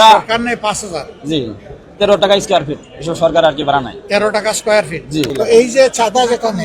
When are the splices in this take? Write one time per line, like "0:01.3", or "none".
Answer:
0:05.3